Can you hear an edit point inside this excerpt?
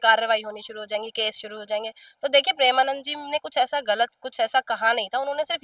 no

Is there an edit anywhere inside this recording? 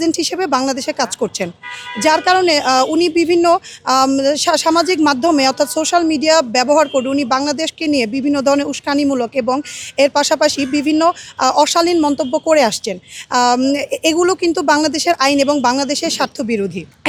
no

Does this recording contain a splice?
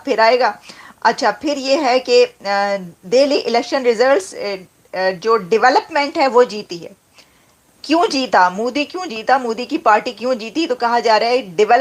no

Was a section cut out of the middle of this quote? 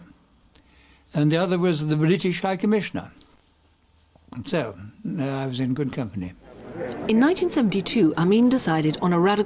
yes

